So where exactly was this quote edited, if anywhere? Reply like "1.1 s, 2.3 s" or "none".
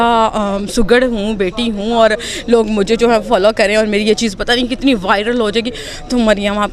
none